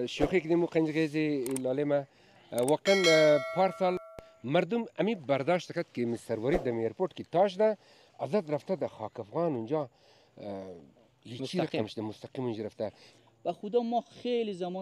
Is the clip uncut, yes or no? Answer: no